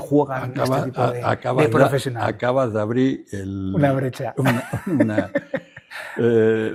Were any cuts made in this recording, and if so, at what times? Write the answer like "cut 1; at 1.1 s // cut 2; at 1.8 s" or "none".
none

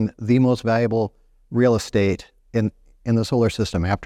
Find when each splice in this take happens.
none

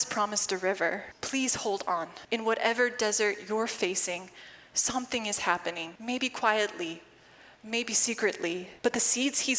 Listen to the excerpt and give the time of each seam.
cut 1; at 1.1 s // cut 2; at 2.2 s // cut 3; at 5.9 s // cut 4; at 8.7 s

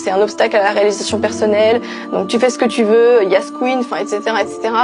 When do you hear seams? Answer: none

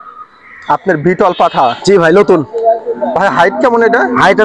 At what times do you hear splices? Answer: none

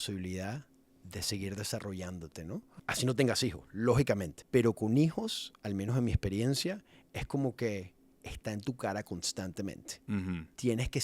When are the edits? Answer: cut 1; at 2.7 s // cut 2; at 4.3 s

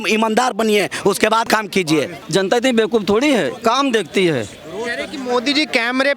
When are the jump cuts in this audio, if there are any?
cut 1; at 1.7 s

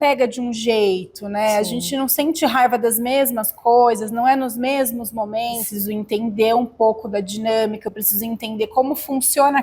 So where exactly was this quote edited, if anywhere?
cut 1; at 5.7 s

